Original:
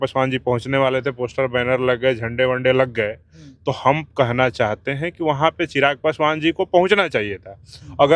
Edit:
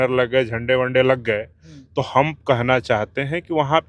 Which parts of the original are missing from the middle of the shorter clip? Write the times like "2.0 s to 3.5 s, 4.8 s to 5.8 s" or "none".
none